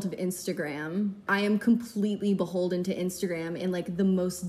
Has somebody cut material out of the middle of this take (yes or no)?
yes